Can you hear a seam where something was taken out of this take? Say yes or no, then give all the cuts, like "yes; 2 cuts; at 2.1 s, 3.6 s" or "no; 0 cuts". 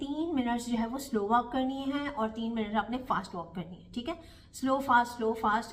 no; 0 cuts